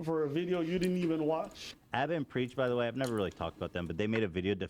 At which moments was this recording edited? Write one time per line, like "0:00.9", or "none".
0:01.8